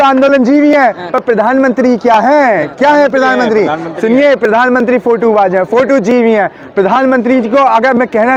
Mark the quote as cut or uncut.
uncut